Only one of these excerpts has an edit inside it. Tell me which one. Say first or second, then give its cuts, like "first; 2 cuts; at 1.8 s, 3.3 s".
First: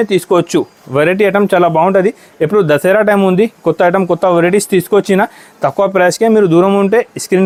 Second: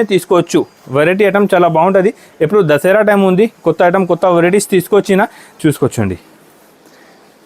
second; 1 cut; at 5.4 s